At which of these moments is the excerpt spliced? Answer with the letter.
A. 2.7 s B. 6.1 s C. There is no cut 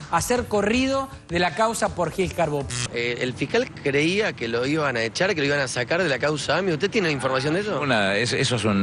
A